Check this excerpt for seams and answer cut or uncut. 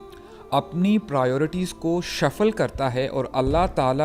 uncut